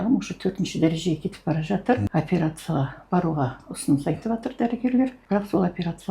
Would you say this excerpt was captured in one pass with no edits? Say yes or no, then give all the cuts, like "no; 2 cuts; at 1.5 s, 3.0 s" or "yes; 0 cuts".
no; 2 cuts; at 2.1 s, 5.2 s